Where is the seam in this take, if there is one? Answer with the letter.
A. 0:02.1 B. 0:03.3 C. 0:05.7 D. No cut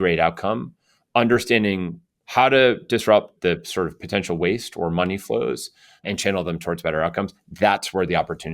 B